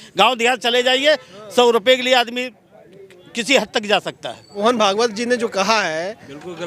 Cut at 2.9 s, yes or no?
no